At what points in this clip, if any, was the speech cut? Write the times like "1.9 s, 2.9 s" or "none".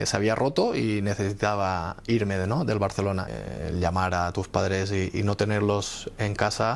3.3 s